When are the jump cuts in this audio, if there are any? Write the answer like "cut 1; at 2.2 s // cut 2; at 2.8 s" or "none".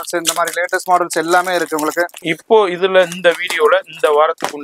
cut 1; at 2.3 s